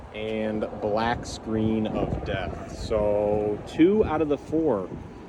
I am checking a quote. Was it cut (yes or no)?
no